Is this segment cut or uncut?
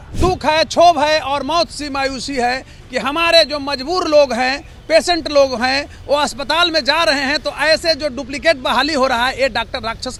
uncut